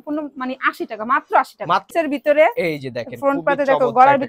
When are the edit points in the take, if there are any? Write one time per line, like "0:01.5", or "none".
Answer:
0:01.9